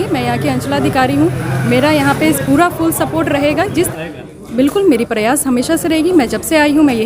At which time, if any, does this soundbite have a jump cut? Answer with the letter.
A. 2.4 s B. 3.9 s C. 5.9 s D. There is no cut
B